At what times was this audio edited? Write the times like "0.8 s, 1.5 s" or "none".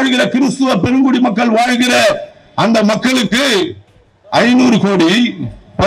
none